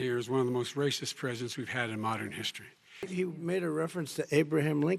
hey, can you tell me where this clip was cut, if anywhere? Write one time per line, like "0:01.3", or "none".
0:03.1

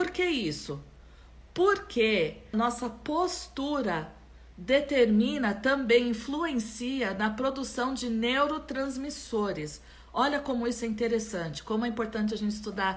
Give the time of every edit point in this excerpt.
0:02.5

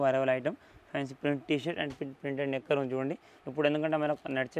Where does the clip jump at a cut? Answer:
0:03.3

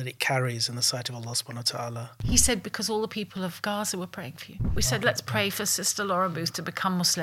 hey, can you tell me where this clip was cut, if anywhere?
0:02.2
0:04.7

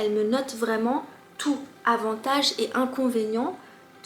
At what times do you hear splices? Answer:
none

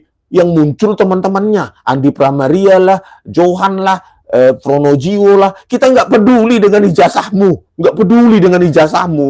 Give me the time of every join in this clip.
0:07.7

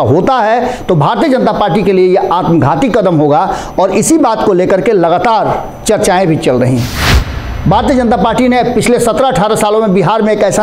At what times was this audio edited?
0:07.0

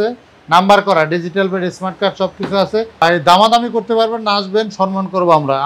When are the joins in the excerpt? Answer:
0:03.0

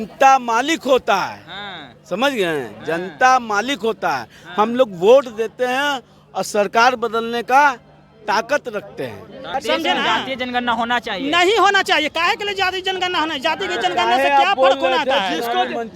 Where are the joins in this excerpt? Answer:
0:09.5

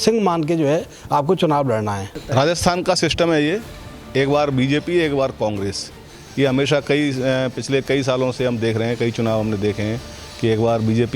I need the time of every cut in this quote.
0:02.1

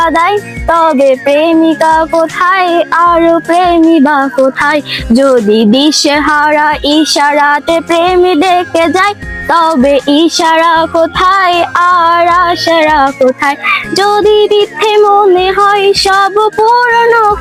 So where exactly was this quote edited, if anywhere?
none

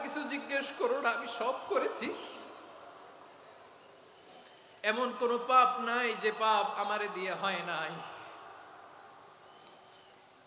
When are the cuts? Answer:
none

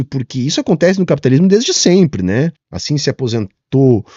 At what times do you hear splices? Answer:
0:02.7

